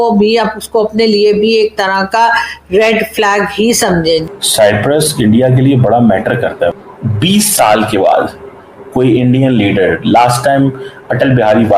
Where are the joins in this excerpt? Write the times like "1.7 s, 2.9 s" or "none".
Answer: 4.3 s, 6.7 s